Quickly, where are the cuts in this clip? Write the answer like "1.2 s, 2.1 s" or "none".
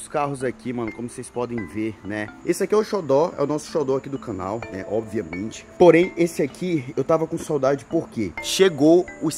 2.3 s, 5.7 s